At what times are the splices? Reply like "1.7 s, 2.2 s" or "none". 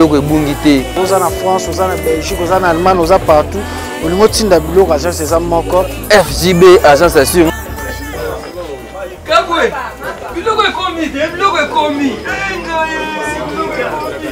none